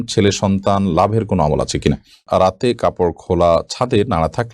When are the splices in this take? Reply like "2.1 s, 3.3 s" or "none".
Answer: 2.1 s